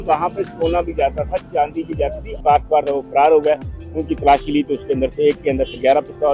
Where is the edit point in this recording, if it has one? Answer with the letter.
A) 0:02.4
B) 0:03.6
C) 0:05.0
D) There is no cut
A